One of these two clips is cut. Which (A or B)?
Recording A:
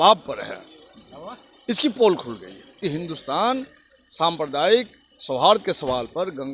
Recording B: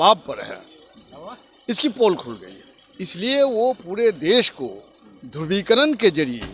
A